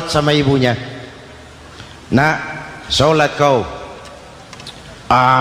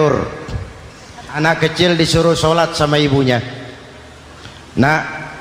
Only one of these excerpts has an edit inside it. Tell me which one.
second; 1 cut; at 1.4 s

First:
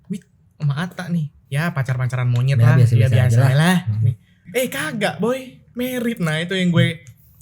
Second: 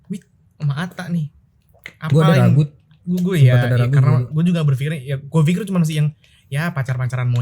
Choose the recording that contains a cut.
first; 2 cuts; at 1.4 s, 4.4 s

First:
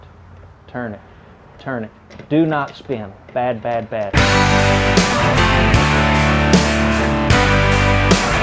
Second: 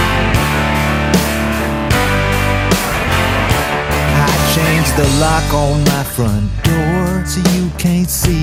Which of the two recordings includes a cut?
first; 1 cut; at 4.1 s

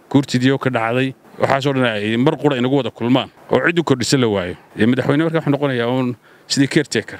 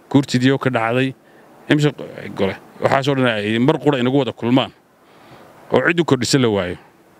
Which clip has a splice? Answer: first; 3 cuts; at 1.2 s, 3.3 s, 4.6 s

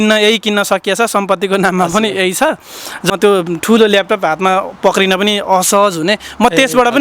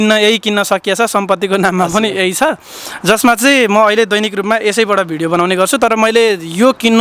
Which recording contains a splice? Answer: first; 1 cut; at 3.1 s

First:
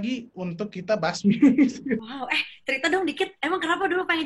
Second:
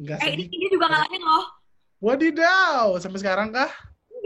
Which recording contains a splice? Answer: first; 1 cut; at 2.1 s

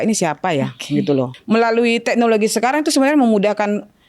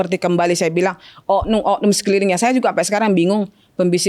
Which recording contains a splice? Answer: first; 1 cut; at 1.3 s

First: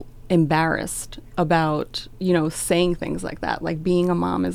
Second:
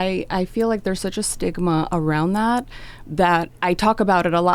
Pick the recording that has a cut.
second; 1 cut; at 3.5 s

